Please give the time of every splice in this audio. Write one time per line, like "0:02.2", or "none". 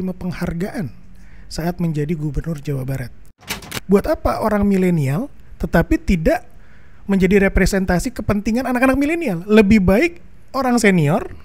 0:03.7